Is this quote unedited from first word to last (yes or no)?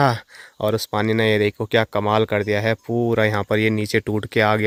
yes